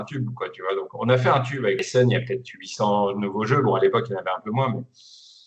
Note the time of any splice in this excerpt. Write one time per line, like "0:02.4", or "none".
0:01.8